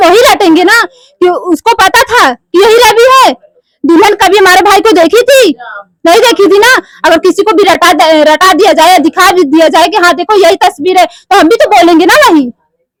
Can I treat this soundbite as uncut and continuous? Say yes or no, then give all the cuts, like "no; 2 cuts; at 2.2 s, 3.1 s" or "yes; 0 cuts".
yes; 0 cuts